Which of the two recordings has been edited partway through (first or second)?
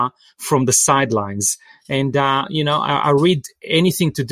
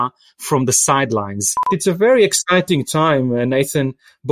second